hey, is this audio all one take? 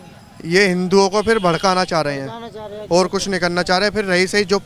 yes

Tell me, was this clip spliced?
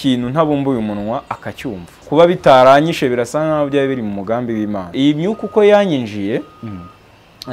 yes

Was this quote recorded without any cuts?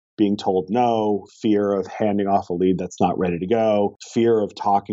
no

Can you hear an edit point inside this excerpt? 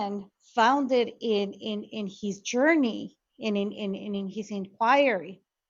no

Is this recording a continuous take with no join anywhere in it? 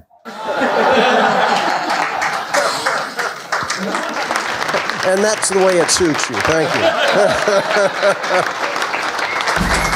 yes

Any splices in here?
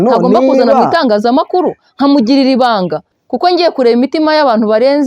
yes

